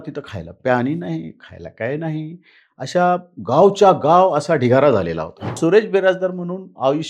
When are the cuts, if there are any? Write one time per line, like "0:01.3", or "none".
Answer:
0:05.5